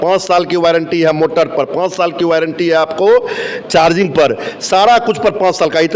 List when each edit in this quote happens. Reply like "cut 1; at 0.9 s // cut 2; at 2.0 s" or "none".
none